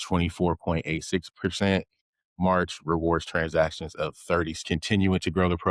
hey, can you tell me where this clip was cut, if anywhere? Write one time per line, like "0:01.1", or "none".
0:04.6